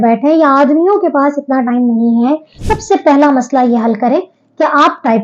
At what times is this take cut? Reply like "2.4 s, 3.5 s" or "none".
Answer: 2.6 s